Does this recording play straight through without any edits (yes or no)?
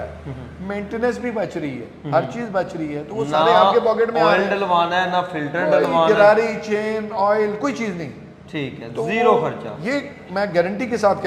yes